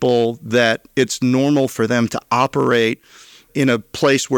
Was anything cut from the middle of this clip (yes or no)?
no